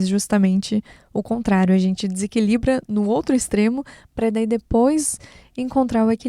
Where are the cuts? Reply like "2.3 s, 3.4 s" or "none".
none